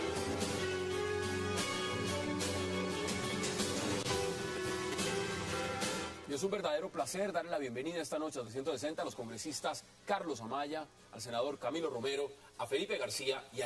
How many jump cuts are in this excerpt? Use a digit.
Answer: 1